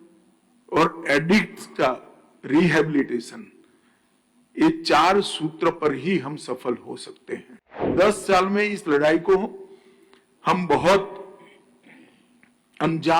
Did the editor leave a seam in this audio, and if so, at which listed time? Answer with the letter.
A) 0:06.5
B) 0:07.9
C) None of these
B